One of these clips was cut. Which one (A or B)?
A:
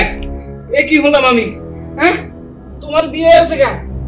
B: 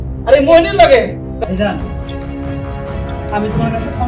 B